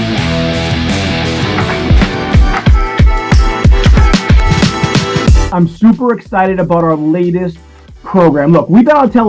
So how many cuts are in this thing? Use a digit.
1